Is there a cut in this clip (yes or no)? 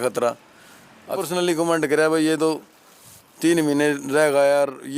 yes